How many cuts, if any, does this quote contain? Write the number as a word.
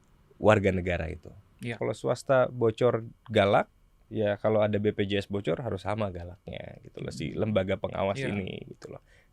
one